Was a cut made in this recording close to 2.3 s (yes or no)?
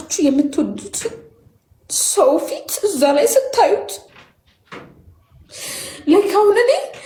no